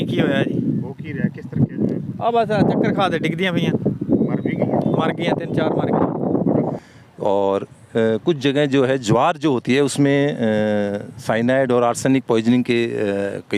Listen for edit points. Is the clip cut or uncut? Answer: cut